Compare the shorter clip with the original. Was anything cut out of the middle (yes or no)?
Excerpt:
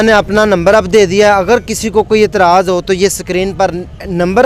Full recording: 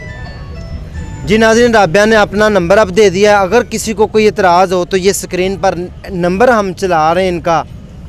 no